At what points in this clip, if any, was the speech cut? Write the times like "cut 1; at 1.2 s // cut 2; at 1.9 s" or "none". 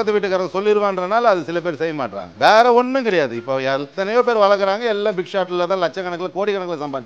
cut 1; at 2.4 s